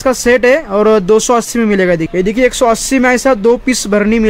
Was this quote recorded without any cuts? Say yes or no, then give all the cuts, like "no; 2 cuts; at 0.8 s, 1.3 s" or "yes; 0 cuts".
no; 1 cut; at 2.1 s